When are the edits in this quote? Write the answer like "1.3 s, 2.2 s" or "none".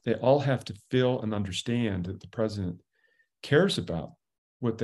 none